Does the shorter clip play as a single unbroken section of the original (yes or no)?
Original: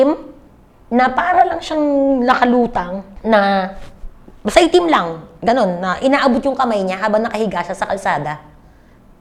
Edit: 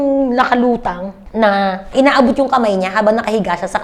no